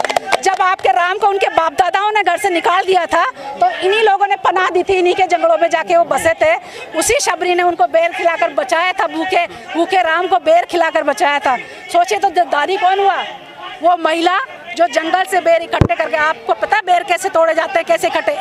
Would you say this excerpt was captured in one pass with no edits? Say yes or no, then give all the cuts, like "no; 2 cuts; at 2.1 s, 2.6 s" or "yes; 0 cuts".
yes; 0 cuts